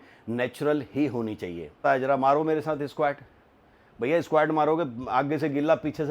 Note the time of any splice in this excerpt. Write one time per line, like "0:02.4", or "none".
0:01.8